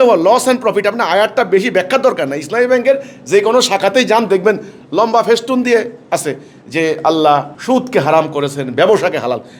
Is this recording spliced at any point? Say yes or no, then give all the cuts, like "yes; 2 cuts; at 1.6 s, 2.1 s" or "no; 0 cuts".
yes; 1 cut; at 7.5 s